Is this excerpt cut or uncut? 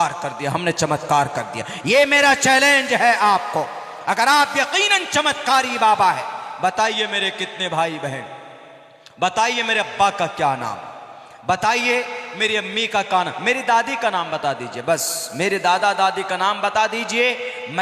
uncut